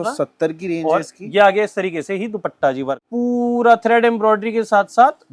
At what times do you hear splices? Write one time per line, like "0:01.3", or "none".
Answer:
0:03.0